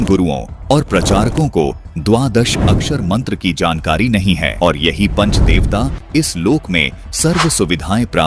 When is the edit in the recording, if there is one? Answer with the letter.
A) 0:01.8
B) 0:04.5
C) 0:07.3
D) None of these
B